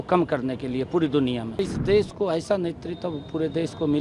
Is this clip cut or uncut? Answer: cut